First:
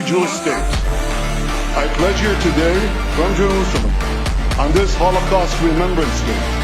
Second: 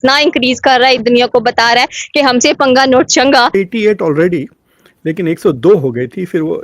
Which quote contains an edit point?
second; 2 cuts; at 1.0 s, 3.5 s

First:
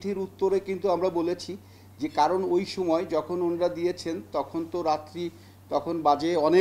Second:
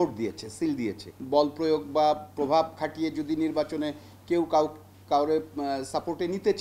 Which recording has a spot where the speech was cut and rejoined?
second; 1 cut; at 1.1 s

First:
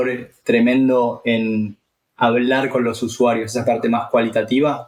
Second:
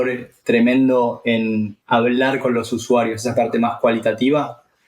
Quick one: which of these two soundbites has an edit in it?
second; 1 cut; at 1.8 s

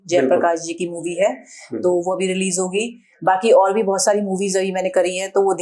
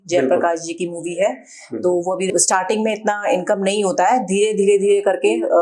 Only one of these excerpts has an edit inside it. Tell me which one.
second; 1 cut; at 2.8 s

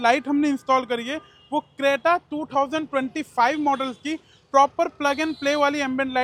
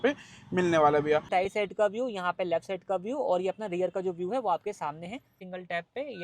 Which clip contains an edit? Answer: second; 2 cuts; at 1.3 s, 5.4 s

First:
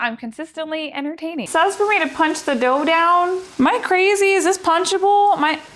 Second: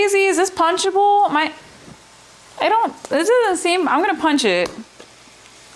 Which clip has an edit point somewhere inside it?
first; 1 cut; at 1.4 s

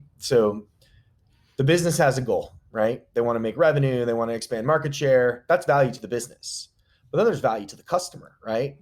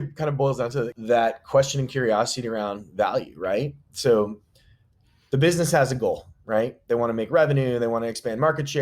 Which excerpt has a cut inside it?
second; 1 cut; at 1.0 s

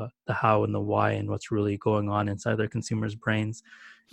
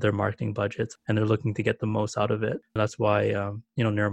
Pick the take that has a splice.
second; 2 cuts; at 1.0 s, 2.7 s

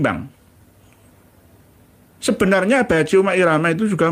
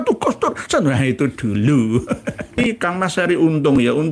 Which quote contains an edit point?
second; 1 cut; at 2.6 s

